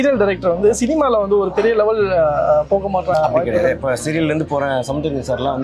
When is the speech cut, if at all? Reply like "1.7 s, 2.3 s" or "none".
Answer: 3.1 s